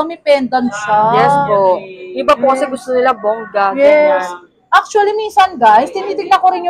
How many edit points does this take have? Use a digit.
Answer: 0